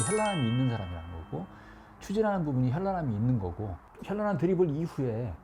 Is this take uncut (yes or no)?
no